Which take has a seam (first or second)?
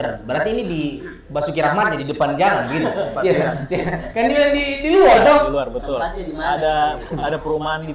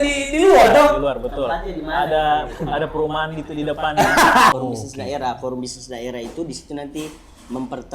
second